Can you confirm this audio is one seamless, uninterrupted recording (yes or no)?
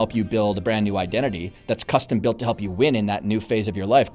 yes